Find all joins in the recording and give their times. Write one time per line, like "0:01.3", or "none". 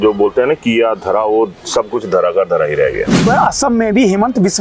0:03.3